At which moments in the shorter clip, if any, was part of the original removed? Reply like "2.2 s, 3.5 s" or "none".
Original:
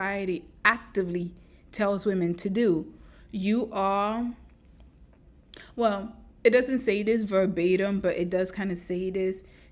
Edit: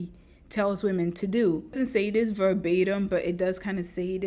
1.8 s